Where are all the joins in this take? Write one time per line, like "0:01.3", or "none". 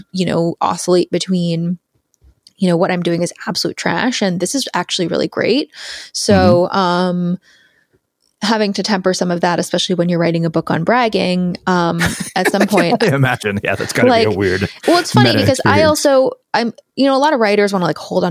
none